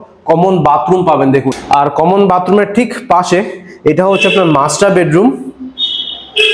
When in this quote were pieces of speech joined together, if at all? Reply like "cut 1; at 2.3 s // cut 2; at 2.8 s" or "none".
none